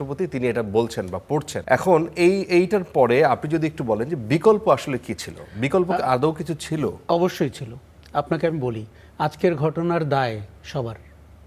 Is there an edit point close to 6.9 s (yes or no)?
no